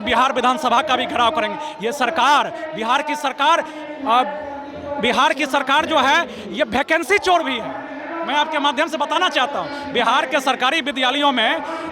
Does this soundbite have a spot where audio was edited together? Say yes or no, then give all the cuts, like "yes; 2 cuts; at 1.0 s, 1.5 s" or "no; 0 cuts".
no; 0 cuts